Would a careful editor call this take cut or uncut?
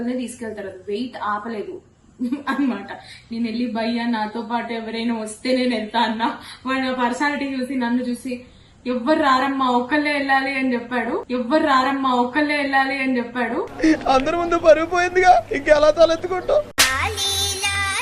uncut